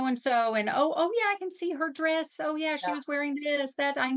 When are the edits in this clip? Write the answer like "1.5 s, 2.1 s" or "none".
none